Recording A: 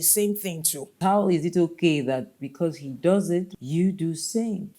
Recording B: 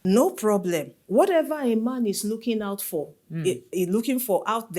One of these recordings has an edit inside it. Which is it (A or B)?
A